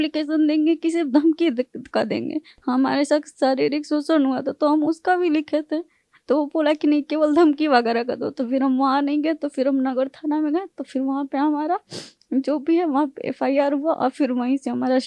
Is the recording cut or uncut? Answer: uncut